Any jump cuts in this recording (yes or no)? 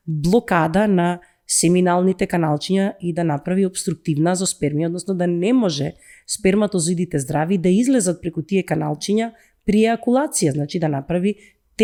no